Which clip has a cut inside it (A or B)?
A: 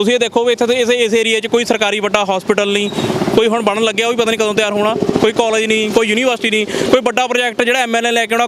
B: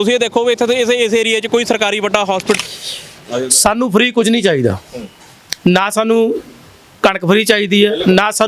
B